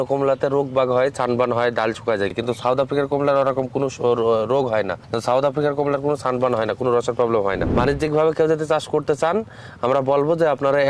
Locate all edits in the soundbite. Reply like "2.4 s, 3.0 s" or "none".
2.3 s, 5.1 s, 7.7 s